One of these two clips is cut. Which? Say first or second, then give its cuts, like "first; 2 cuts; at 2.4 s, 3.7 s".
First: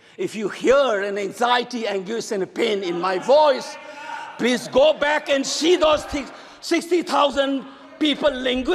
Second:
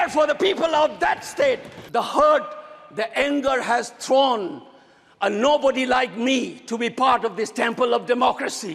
second; 1 cut; at 1.7 s